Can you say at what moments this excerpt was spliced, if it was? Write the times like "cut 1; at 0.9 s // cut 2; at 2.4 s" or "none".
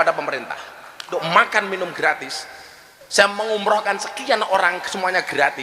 cut 1; at 1.1 s